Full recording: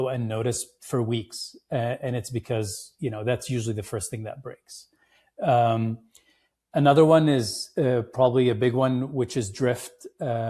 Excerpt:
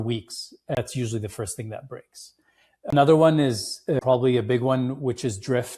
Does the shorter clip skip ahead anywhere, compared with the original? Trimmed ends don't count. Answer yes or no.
yes